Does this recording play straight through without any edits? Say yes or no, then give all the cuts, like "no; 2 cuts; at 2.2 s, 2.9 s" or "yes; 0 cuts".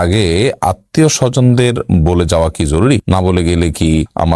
yes; 0 cuts